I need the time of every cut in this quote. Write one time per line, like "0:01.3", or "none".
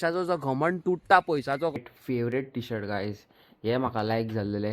0:01.8